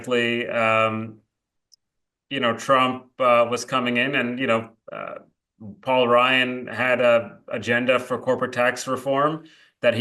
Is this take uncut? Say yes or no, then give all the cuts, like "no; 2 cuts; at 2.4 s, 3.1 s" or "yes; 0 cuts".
yes; 0 cuts